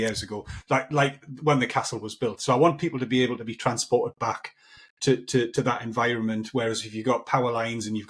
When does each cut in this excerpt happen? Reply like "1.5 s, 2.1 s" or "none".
none